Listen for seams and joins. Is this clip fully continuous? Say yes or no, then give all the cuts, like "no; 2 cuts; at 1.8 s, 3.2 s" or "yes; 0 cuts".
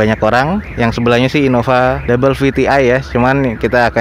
yes; 0 cuts